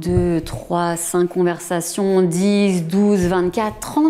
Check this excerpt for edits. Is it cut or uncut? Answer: uncut